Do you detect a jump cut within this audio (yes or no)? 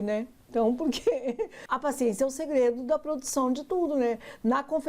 yes